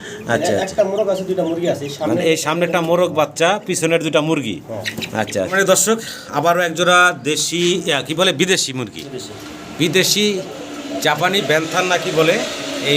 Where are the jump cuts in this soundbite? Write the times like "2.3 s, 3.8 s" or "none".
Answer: 5.5 s